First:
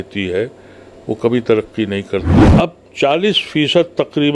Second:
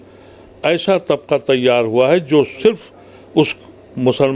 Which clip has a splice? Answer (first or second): first